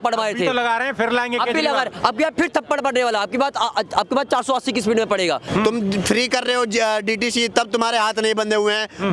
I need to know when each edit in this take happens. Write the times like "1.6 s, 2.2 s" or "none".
5.4 s